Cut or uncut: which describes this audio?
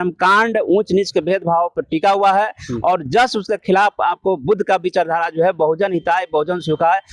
uncut